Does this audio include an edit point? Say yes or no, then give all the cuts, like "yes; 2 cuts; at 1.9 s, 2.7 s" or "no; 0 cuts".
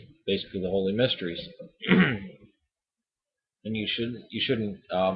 no; 0 cuts